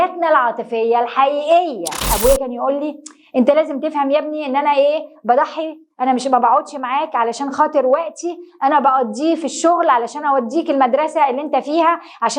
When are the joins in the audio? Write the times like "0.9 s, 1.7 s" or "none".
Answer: 2.0 s